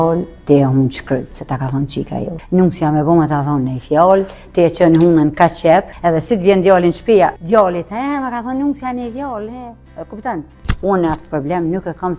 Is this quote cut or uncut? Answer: cut